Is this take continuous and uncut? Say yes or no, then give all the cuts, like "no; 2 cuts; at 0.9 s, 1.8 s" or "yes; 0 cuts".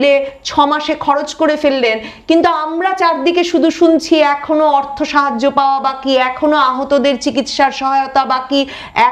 yes; 0 cuts